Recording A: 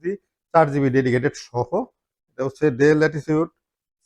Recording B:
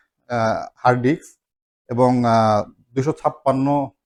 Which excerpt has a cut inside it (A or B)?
A